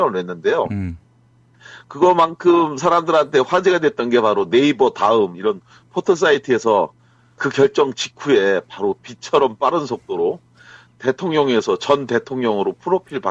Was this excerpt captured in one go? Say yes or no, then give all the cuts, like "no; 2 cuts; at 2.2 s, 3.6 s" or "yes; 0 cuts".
yes; 0 cuts